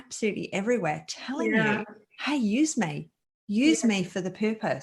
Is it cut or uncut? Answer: uncut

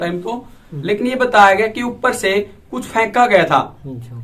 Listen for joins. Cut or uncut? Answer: uncut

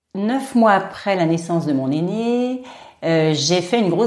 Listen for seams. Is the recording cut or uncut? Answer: cut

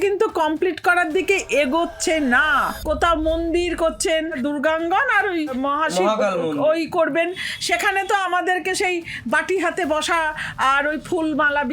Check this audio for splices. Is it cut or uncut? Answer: cut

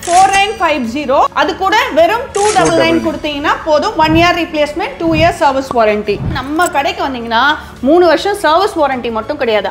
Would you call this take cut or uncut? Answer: cut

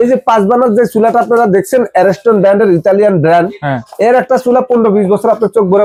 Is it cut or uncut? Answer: uncut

